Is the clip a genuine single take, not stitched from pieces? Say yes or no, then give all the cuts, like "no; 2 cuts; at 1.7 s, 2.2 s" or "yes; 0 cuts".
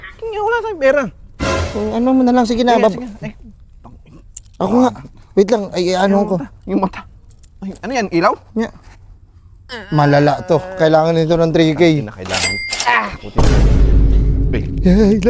yes; 0 cuts